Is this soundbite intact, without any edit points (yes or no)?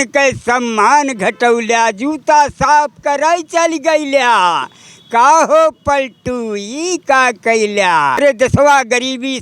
no